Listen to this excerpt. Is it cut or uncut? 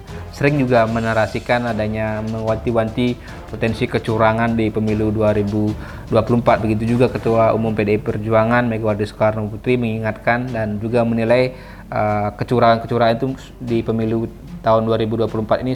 uncut